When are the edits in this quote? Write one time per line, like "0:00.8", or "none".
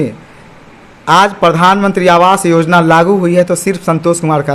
none

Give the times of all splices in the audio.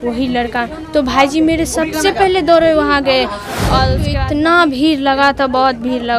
0:04.0

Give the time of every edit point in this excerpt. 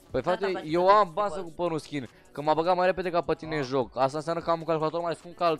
none

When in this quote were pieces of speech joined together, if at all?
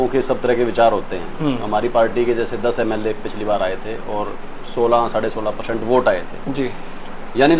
none

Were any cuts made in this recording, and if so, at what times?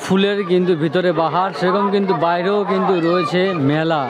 none

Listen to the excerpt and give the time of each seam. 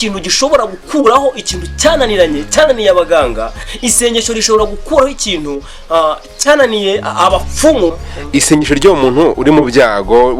0:08.1

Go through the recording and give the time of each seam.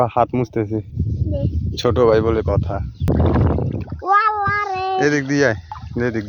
0:03.1

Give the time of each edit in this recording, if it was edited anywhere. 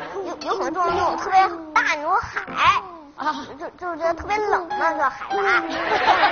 none

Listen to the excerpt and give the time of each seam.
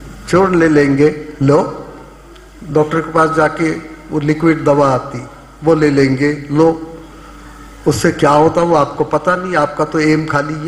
none

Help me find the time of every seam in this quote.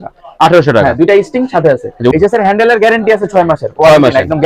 0:02.1

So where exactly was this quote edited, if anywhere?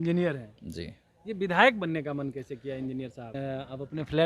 0:03.4

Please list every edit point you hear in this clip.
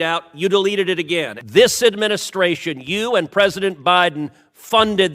0:01.4

